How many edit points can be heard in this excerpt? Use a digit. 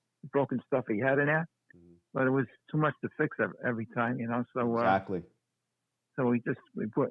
0